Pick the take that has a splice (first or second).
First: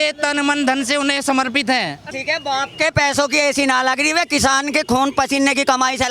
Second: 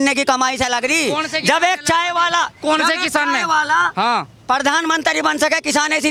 first